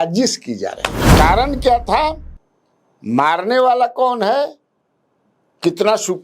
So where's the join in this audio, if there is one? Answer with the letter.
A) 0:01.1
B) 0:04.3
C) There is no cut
A